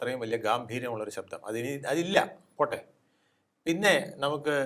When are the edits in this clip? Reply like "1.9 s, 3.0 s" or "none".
none